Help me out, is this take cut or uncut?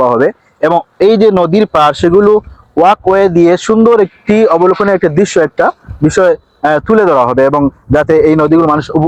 uncut